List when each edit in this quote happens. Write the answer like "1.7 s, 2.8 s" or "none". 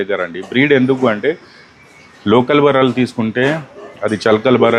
none